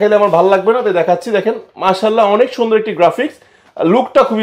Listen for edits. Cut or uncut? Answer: uncut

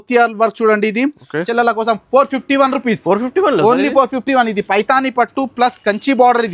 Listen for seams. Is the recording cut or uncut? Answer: cut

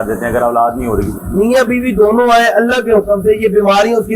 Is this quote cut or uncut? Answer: cut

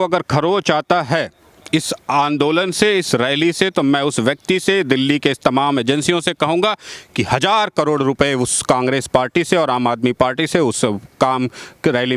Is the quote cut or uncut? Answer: uncut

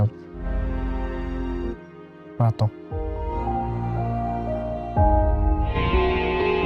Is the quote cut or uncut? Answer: cut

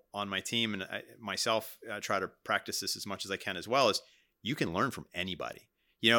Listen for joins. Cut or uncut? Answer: uncut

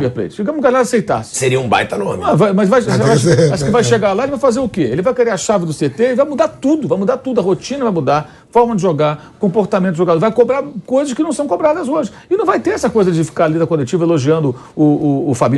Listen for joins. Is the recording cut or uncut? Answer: uncut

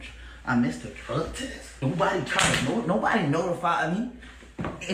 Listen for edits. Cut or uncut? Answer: cut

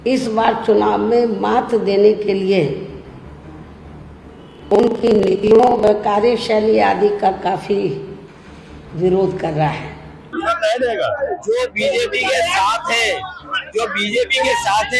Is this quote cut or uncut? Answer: cut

